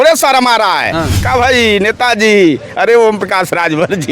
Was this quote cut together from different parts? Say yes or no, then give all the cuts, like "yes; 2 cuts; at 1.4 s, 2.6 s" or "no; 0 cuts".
yes; 1 cut; at 1.2 s